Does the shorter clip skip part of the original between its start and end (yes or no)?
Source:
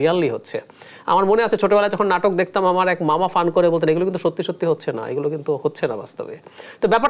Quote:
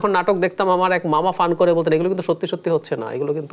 no